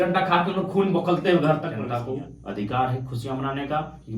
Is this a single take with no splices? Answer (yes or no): no